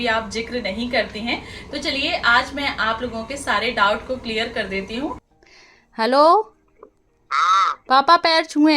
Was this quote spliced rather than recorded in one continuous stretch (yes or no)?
yes